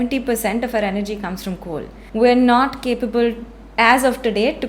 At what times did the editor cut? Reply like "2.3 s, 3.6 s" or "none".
2.0 s